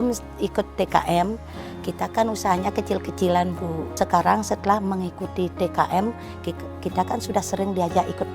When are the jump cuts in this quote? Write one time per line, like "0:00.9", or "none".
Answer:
0:03.9